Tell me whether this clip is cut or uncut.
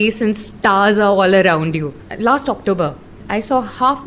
cut